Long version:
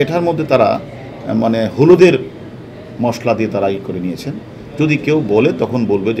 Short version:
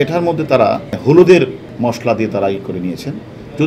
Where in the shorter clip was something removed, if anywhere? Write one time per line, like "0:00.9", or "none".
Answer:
0:01.0
0:01.6